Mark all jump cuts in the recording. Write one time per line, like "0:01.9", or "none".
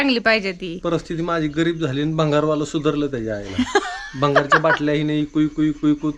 none